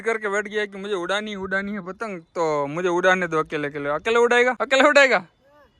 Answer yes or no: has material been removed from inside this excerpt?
yes